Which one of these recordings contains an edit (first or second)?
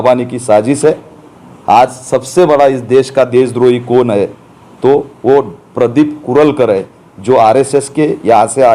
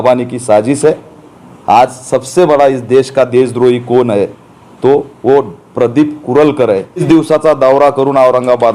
second